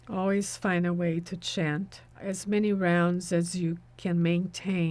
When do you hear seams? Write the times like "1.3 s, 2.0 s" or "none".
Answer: 2.2 s